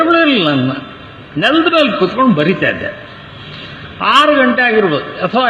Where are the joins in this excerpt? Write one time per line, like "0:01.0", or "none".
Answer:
none